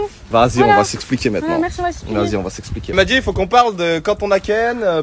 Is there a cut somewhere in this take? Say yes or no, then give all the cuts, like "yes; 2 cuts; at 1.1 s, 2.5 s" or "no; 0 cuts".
no; 0 cuts